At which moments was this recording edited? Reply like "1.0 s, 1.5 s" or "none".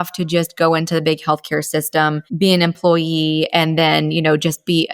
2.2 s